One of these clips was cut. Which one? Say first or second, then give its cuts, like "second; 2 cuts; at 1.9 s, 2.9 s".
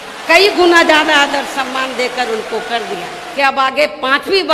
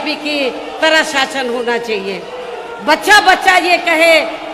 first; 1 cut; at 3.2 s